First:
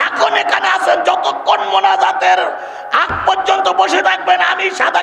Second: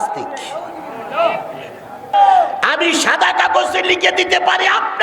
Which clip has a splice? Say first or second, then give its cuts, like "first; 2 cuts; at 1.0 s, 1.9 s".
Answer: second; 1 cut; at 2.1 s